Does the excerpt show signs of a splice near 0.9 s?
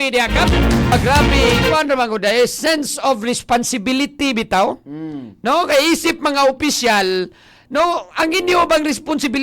yes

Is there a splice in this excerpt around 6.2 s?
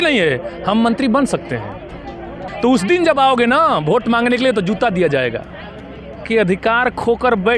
yes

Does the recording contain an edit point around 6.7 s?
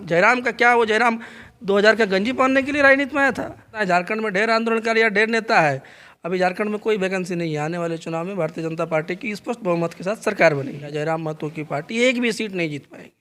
no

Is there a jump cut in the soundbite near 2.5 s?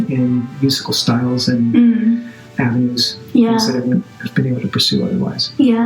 yes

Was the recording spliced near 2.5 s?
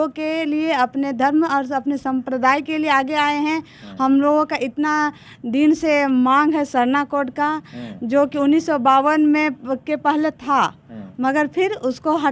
no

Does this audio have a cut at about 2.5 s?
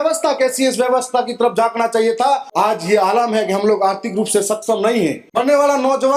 yes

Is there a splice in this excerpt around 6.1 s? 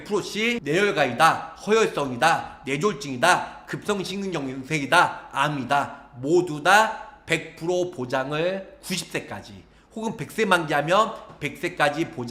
no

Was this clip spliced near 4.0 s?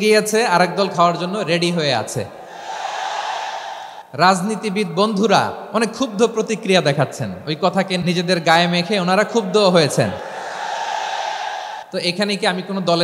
yes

